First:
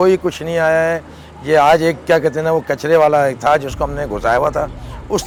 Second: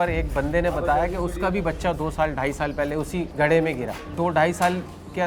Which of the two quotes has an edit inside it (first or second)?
second